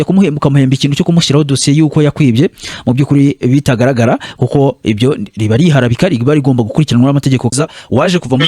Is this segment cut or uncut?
cut